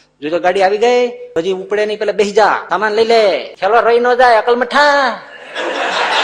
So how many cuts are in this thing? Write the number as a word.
three